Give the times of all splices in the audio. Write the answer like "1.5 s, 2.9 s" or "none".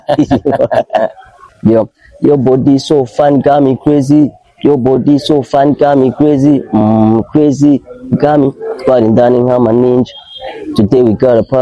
1.3 s